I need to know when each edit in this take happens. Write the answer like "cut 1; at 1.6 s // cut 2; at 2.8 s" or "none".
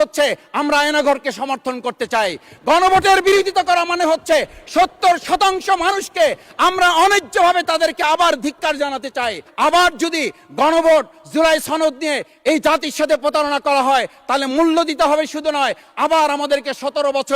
cut 1; at 9.4 s